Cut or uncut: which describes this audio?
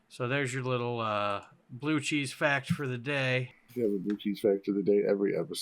cut